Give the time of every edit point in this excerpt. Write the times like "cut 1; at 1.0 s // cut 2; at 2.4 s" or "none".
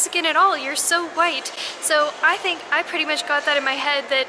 none